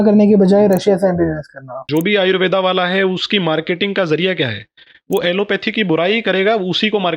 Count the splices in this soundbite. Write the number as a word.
one